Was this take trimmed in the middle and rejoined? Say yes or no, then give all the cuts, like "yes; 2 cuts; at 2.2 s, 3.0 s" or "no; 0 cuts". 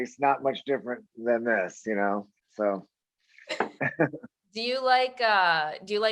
no; 0 cuts